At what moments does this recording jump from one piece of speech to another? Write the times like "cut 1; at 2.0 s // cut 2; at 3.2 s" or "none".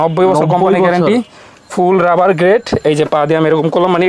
none